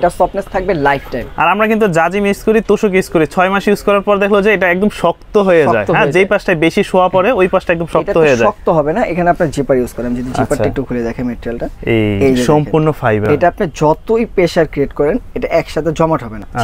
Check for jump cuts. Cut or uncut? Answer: uncut